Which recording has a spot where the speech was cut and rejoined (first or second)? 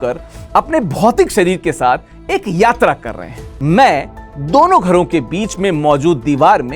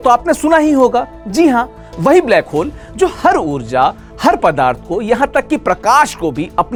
first